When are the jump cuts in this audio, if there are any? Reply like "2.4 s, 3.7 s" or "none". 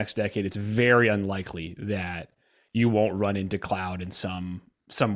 none